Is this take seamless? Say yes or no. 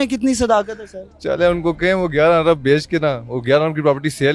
yes